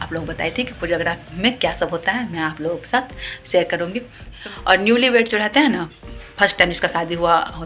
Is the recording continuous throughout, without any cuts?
no; 1 cut; at 4.3 s

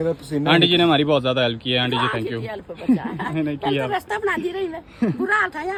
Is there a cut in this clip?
no; 0 cuts

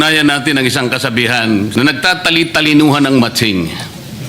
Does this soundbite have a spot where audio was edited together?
yes; 1 cut; at 1.7 s

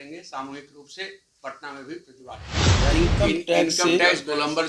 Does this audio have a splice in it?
yes; 1 cut; at 2.6 s

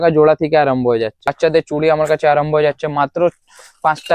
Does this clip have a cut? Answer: yes; 1 cut; at 1.3 s

